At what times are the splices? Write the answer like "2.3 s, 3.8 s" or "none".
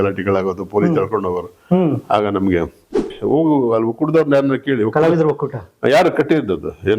3.1 s